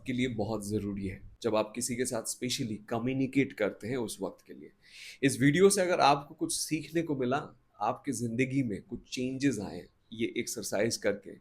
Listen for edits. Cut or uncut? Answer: cut